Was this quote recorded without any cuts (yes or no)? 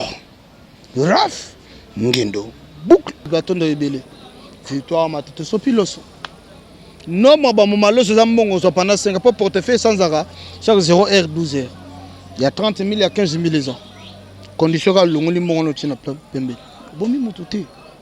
no